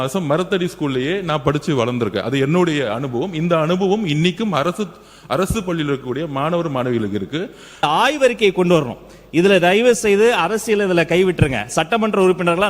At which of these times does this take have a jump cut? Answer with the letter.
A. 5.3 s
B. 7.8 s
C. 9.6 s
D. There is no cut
B